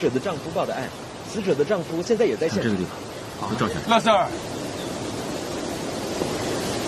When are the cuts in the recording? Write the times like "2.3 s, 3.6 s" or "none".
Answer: 2.6 s

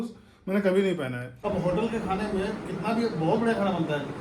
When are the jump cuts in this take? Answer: 1.3 s

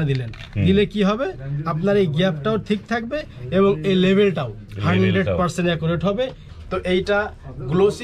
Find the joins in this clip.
6.4 s

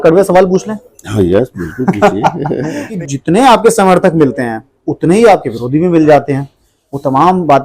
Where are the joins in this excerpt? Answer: 2.8 s

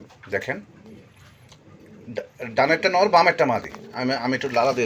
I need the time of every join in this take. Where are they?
none

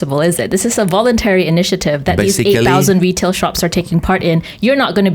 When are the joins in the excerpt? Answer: none

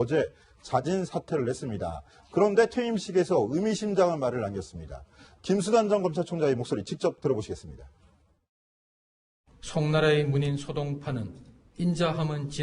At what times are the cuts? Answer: 10.4 s

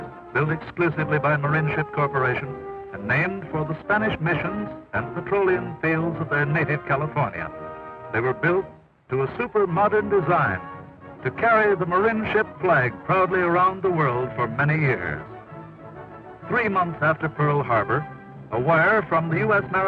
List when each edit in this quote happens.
18.7 s

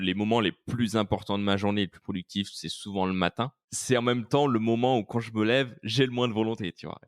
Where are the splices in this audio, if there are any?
3.7 s

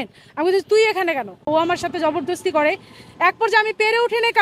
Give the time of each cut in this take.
1.5 s

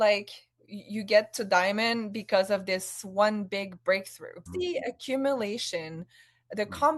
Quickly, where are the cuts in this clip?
4.4 s

